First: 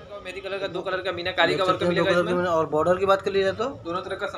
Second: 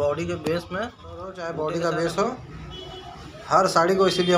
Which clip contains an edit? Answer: second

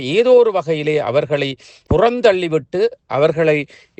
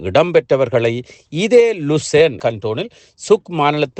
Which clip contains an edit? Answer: second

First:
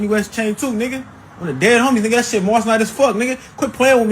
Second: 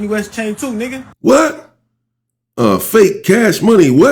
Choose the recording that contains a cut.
first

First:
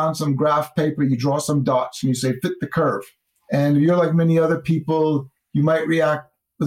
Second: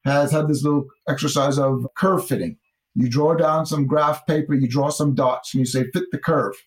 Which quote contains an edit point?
first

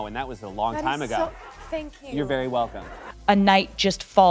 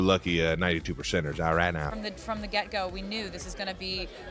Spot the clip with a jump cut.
first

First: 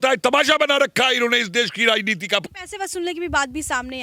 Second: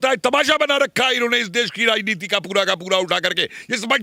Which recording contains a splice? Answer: first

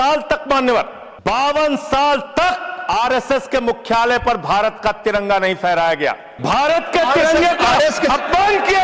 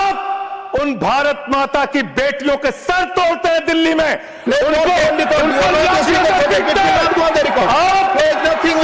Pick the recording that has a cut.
first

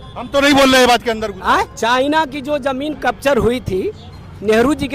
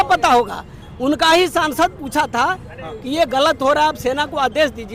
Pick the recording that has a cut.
first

